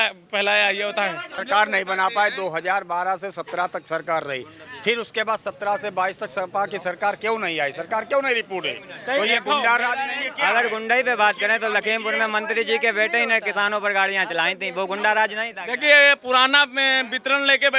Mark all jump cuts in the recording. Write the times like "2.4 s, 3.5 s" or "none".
1.4 s